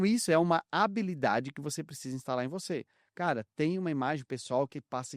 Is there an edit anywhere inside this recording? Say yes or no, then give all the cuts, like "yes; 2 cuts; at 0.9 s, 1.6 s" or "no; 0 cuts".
no; 0 cuts